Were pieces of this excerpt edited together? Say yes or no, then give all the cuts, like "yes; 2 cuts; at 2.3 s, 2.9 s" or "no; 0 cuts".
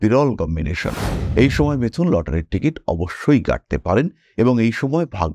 yes; 1 cut; at 1.1 s